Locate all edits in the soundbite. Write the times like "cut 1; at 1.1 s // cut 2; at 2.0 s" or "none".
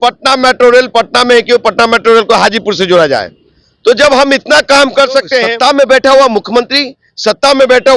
cut 1; at 5.5 s

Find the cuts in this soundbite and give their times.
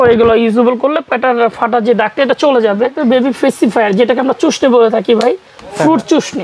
cut 1; at 3.0 s

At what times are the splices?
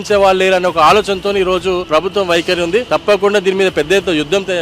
cut 1; at 1.8 s // cut 2; at 2.9 s

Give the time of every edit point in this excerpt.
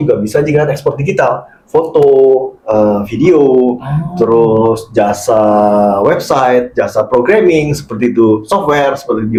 none

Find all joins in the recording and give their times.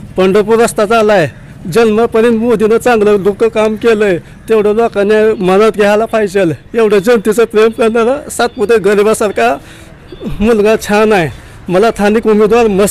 none

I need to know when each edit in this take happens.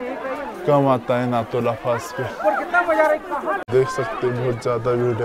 none

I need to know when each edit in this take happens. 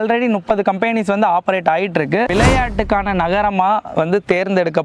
cut 1; at 2.3 s

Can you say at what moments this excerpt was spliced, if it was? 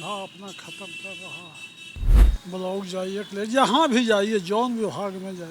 cut 1; at 2.2 s

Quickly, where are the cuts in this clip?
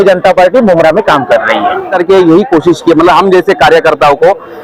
cut 1; at 1.9 s

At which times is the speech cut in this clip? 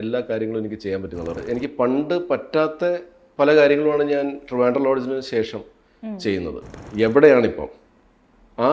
cut 1; at 1.4 s // cut 2; at 6.8 s

